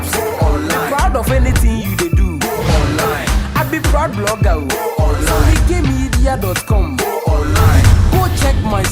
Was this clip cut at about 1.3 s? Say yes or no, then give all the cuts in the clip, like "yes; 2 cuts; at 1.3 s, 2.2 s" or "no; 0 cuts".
no; 0 cuts